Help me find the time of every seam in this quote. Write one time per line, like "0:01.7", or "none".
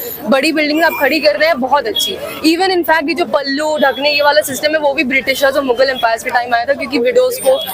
none